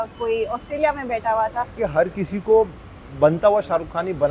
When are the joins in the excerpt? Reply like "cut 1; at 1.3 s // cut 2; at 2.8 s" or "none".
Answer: cut 1; at 1.8 s